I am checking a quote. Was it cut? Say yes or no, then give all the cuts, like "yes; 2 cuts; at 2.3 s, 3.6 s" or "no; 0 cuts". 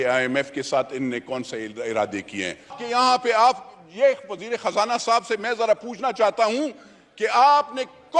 yes; 1 cut; at 2.8 s